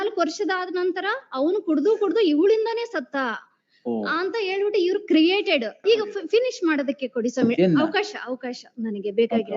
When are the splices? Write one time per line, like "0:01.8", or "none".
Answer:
0:05.8